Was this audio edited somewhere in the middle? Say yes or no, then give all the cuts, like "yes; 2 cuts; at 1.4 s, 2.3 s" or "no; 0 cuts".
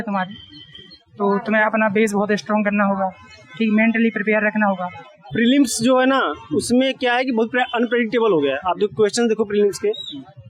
yes; 1 cut; at 5.3 s